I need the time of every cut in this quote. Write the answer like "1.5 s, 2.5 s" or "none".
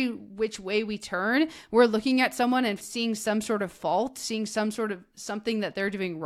2.8 s